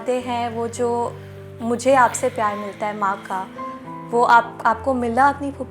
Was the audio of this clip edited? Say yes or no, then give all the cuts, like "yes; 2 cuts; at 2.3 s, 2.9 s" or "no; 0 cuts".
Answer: no; 0 cuts